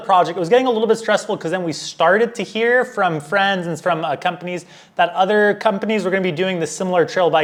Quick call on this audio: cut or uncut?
uncut